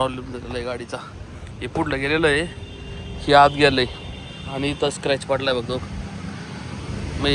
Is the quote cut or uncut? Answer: uncut